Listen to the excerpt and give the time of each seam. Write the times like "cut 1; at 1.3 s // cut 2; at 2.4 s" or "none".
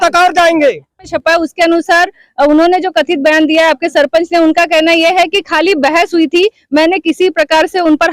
cut 1; at 1.1 s